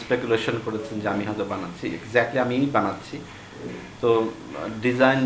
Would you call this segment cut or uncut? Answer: uncut